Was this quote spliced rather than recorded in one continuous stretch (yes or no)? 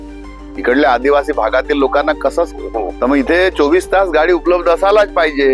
yes